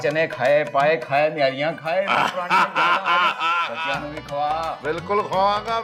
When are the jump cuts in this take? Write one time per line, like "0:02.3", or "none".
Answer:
none